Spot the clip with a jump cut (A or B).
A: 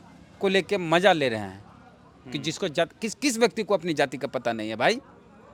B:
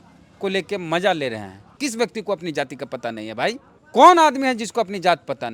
B